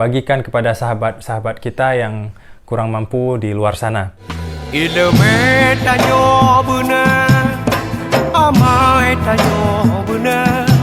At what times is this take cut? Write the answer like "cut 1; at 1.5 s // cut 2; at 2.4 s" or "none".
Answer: none